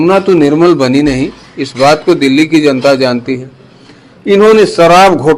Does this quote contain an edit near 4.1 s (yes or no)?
yes